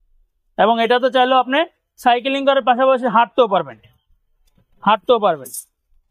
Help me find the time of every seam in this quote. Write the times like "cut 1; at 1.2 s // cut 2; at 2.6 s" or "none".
none